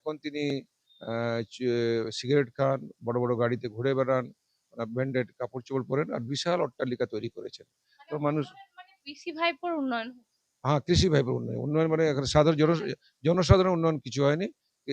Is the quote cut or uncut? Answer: uncut